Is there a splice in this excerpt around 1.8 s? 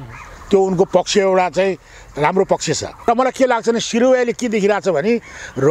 no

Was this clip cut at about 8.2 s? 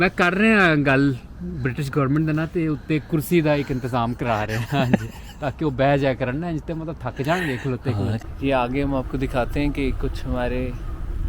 yes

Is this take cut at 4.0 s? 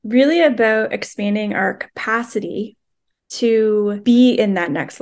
yes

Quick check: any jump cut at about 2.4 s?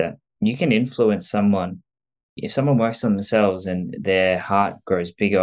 yes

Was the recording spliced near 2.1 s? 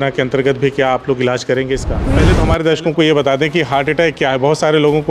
yes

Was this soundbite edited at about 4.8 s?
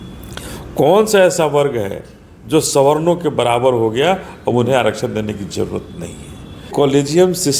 no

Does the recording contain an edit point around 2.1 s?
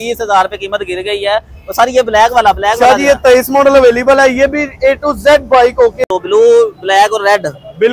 no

